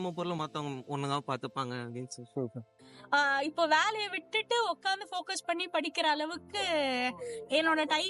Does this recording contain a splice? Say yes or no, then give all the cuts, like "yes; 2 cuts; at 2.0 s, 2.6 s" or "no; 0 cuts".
yes; 1 cut; at 2.8 s